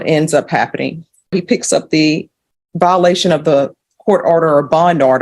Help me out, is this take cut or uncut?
cut